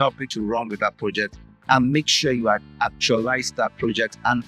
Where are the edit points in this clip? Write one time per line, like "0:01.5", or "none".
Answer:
none